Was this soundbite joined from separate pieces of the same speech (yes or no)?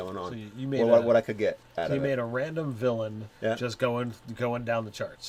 no